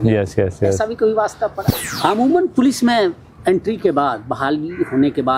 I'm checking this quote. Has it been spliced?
yes; 1 cut; at 1.7 s

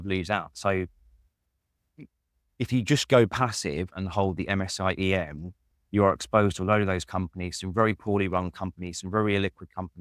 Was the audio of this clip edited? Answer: no; 0 cuts

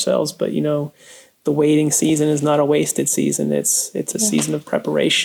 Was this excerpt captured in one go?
yes; 0 cuts

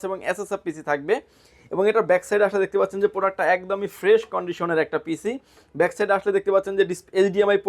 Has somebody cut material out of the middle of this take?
no; 0 cuts

